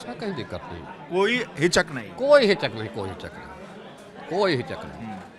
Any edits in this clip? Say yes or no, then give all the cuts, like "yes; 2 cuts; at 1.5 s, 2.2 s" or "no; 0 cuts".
no; 0 cuts